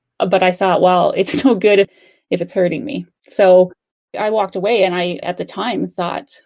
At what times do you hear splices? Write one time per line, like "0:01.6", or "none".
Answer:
0:01.9
0:05.2

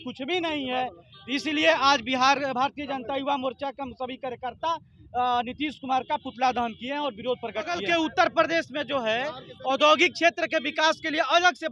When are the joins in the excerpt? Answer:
0:07.8

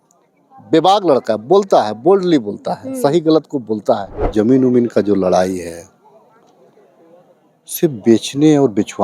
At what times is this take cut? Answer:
0:04.2

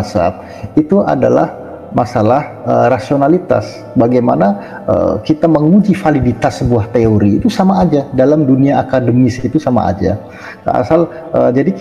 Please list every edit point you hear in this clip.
none

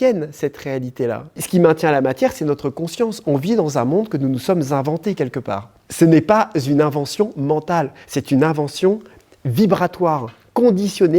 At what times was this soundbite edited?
0:01.4
0:05.8

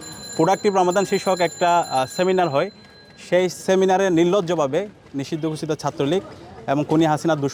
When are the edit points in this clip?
none

